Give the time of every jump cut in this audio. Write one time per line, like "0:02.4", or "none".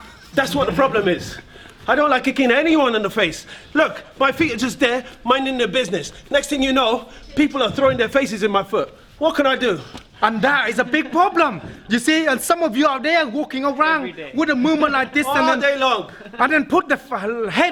none